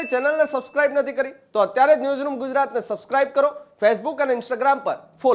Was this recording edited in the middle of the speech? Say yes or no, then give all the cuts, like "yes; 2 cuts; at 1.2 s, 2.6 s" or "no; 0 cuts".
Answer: no; 0 cuts